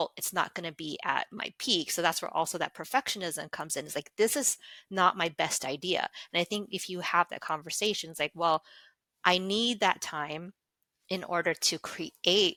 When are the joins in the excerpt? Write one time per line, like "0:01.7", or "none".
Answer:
none